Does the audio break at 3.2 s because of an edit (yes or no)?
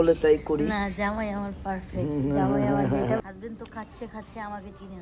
yes